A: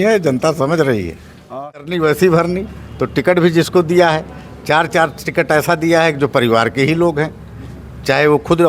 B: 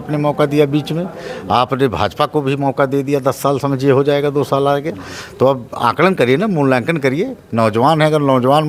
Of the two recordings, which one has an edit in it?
A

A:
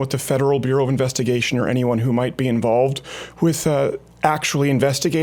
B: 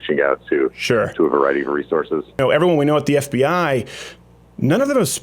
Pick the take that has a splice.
B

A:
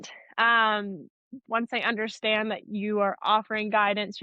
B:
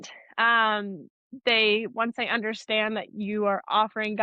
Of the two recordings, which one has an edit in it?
A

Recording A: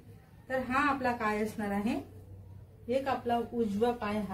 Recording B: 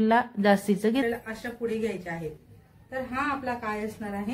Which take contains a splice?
B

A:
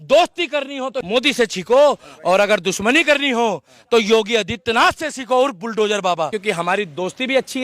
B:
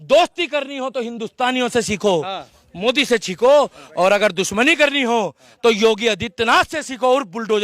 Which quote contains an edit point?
A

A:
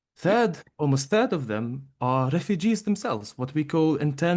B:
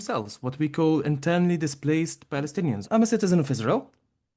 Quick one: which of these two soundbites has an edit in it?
B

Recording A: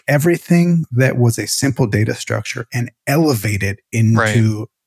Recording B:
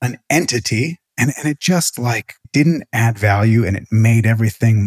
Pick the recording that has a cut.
B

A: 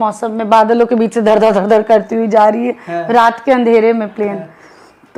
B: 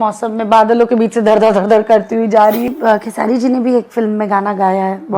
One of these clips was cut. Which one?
B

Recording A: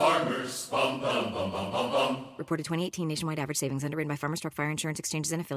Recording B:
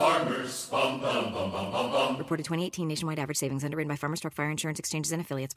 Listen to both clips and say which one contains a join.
B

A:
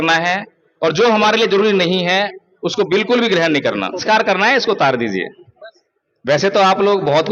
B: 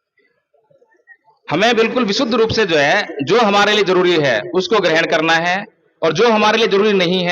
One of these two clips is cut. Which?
A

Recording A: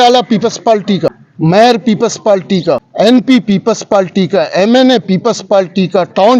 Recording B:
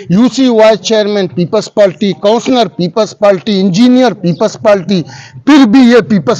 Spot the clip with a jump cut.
A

